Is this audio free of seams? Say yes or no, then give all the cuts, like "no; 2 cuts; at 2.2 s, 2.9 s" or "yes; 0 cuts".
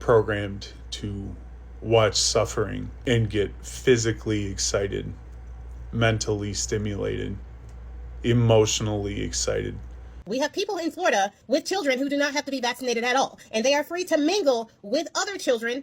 no; 2 cuts; at 2.9 s, 10.2 s